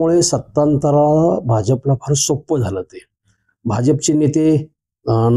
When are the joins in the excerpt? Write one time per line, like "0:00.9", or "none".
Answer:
none